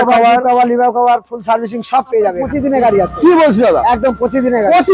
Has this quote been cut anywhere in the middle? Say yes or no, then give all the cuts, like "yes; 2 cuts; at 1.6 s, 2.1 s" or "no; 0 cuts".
yes; 1 cut; at 2.2 s